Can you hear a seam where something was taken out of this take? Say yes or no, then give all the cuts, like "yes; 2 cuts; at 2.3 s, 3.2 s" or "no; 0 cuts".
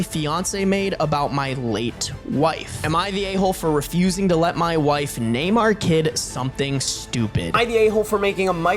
yes; 2 cuts; at 2.8 s, 7.6 s